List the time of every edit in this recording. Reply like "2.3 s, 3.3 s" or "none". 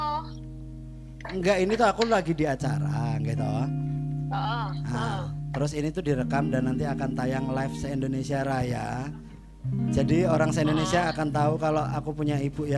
none